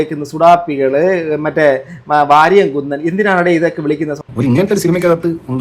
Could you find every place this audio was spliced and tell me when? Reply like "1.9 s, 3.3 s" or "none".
4.1 s